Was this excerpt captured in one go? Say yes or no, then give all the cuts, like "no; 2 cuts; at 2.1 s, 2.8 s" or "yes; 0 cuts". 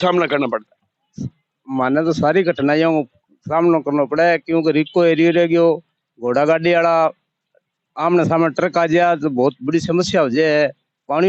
yes; 0 cuts